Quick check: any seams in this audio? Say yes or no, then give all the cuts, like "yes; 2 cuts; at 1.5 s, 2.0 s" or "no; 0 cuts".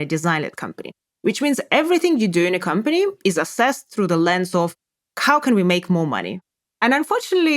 yes; 1 cut; at 6.4 s